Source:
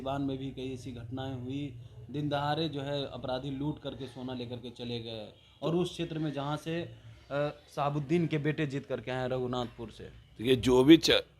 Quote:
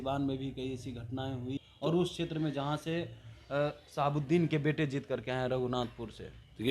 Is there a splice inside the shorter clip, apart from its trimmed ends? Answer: yes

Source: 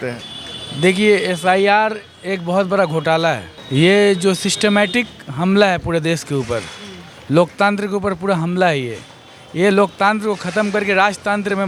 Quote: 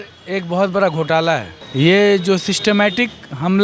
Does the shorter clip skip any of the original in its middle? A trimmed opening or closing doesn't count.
no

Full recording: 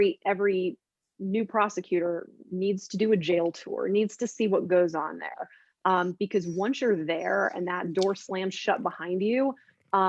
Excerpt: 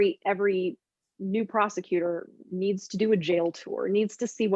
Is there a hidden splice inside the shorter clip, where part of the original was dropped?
no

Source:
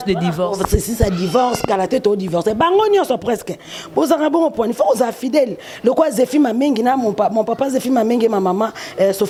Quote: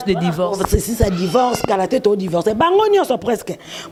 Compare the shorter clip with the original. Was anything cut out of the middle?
no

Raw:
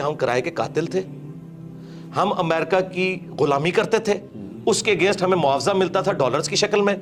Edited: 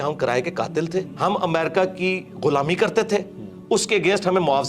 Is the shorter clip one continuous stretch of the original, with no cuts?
no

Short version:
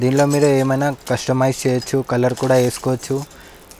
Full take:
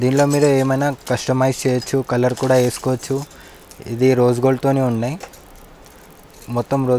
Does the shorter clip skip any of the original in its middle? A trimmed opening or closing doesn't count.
no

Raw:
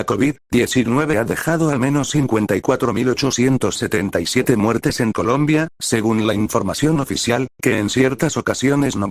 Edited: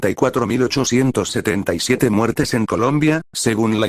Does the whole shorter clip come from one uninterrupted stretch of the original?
yes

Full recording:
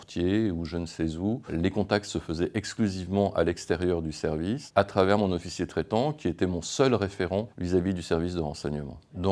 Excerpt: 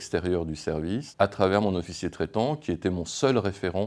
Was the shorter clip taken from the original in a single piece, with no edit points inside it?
yes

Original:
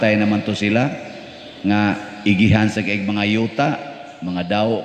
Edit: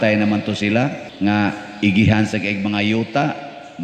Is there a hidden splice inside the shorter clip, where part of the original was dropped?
yes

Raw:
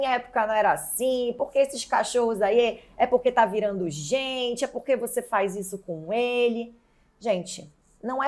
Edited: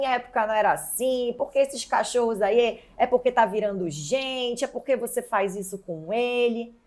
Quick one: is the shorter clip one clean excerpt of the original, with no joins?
yes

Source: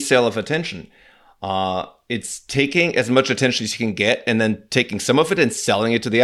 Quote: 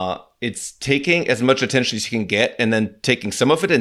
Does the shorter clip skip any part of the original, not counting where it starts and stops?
no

